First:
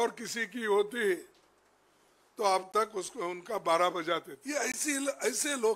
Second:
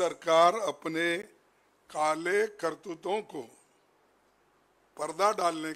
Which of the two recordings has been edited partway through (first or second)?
first